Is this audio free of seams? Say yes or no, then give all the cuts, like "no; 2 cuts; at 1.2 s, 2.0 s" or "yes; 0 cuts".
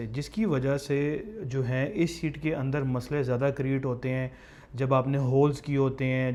yes; 0 cuts